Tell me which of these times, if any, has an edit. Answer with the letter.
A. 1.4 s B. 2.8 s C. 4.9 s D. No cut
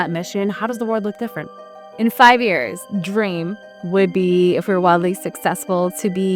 B